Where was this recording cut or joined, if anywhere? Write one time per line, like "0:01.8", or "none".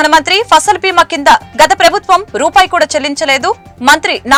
none